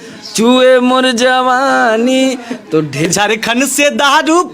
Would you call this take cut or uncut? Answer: cut